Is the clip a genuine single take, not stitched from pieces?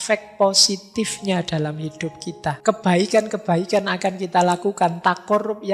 no; 1 cut; at 2.6 s

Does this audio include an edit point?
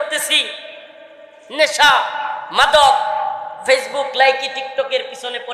no; 0 cuts

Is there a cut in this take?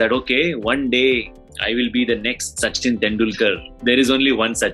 yes; 1 cut; at 3.7 s

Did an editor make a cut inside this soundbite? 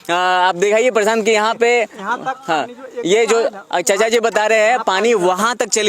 no; 0 cuts

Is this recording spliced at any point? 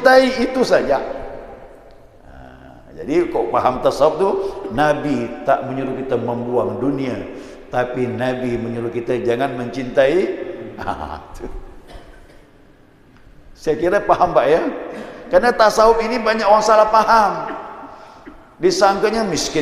no; 0 cuts

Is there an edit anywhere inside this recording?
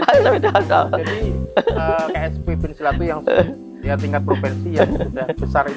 no; 0 cuts

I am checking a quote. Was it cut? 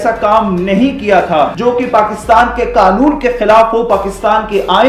yes; 1 cut; at 1.5 s

